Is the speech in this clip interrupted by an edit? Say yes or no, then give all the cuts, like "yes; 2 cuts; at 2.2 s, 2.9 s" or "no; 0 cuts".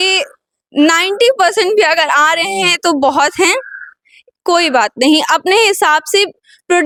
no; 0 cuts